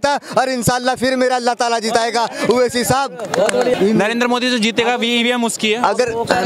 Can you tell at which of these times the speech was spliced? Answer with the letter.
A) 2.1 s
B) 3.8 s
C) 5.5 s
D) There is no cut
B